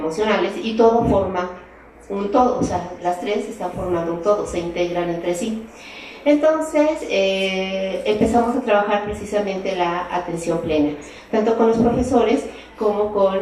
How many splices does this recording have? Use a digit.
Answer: 1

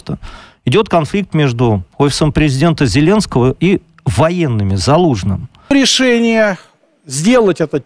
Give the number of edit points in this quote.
1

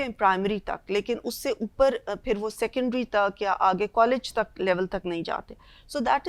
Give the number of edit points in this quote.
0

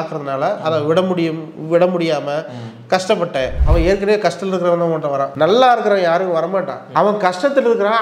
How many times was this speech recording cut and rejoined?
2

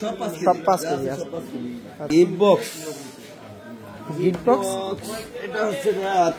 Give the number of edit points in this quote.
1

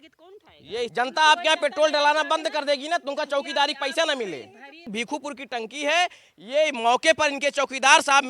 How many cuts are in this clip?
2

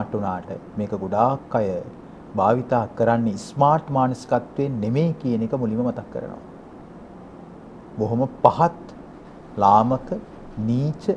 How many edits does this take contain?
0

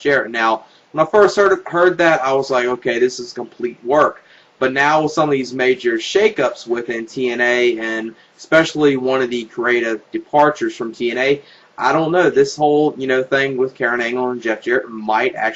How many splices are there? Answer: 0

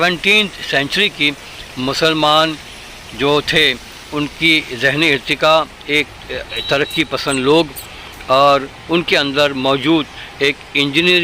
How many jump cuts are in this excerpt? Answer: 0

